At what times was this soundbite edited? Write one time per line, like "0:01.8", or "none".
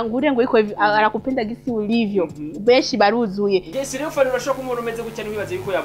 0:03.7